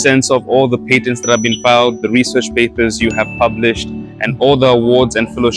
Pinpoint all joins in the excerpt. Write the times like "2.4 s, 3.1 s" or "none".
none